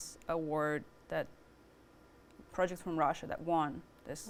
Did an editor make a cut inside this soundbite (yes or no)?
no